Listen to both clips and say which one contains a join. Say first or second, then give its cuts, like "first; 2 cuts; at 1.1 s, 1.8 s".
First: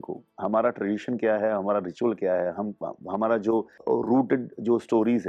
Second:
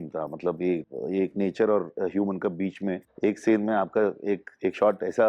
second; 2 cuts; at 0.9 s, 3.1 s